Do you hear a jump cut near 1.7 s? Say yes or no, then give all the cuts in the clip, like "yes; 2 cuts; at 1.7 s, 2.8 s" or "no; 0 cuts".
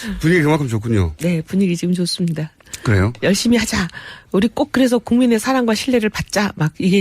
no; 1 cut; at 3.2 s